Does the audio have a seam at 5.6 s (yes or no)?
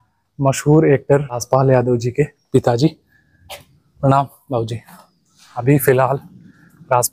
yes